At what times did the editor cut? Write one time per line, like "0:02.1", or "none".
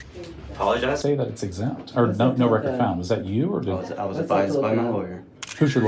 0:01.0

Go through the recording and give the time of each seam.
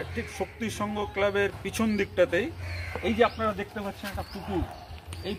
none

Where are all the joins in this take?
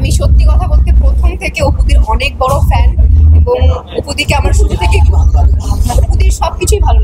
none

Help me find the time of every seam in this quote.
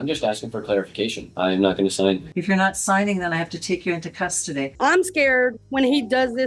0:01.3
0:04.7

